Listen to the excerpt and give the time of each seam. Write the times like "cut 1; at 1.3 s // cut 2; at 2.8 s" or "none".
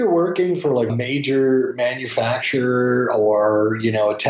cut 1; at 0.9 s